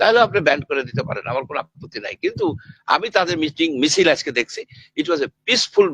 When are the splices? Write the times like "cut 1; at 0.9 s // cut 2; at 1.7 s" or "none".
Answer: none